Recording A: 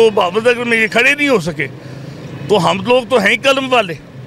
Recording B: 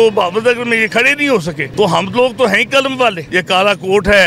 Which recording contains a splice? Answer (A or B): B